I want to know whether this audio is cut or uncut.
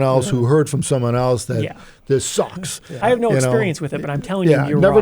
cut